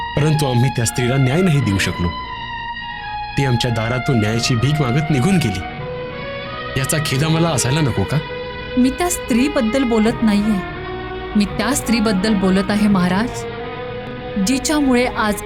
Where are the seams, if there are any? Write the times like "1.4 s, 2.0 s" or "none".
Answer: none